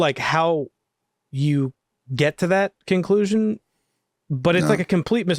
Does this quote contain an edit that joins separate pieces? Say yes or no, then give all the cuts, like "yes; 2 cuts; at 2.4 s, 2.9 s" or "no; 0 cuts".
no; 0 cuts